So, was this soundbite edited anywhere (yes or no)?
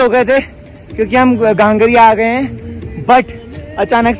no